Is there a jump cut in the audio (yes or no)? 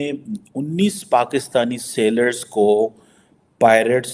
no